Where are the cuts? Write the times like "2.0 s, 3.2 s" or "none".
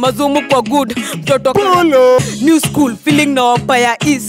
2.2 s

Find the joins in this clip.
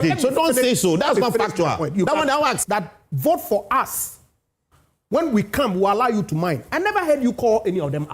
2.6 s

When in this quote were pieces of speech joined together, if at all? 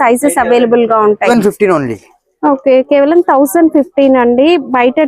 1.3 s

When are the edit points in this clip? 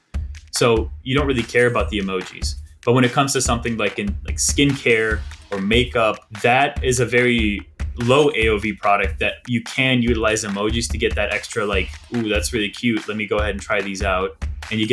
6.3 s, 12.0 s

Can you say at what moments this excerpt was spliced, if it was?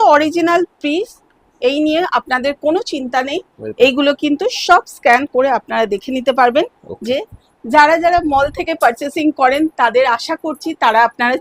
none

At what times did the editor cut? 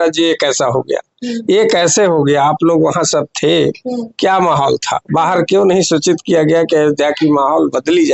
none

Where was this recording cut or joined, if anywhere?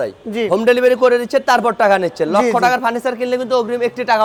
none

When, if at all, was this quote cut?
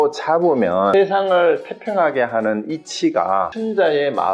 0.9 s, 3.5 s

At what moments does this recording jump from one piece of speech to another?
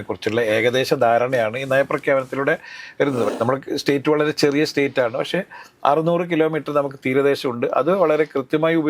3.3 s

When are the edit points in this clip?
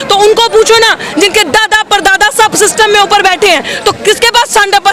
none

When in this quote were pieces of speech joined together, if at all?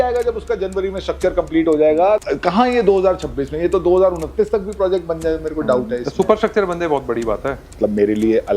2.2 s, 7.7 s

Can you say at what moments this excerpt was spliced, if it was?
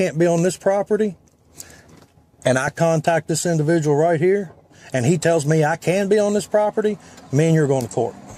none

